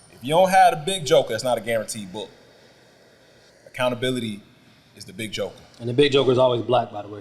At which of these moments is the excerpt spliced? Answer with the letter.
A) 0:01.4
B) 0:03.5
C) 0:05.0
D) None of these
B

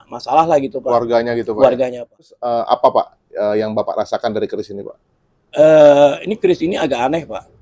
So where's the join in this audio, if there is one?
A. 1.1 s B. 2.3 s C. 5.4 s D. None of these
B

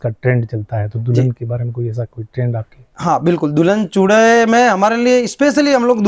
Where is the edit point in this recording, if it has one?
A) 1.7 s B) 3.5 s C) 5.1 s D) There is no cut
D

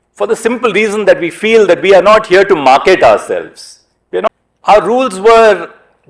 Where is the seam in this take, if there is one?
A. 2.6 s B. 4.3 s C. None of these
B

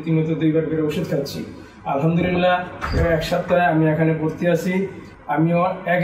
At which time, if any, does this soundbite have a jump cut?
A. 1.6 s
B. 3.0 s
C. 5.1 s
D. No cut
C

